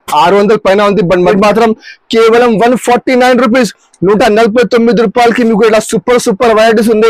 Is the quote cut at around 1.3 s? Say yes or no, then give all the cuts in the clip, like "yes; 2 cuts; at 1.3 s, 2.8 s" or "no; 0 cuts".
yes; 1 cut; at 1.3 s